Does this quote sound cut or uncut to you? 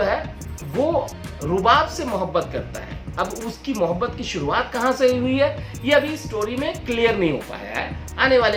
uncut